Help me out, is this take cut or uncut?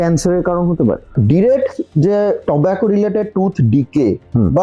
cut